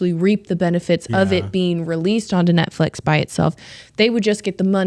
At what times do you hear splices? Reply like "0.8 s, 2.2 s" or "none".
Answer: none